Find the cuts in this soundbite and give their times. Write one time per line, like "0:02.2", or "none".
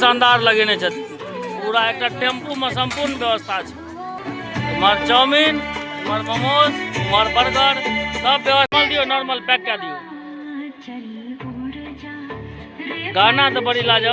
0:04.2
0:08.7